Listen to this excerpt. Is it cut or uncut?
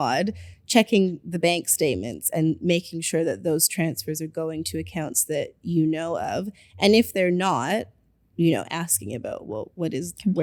uncut